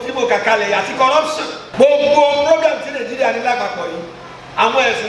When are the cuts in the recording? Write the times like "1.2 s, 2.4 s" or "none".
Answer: 1.6 s